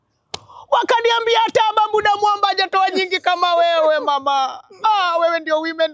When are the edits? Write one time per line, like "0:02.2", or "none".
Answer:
none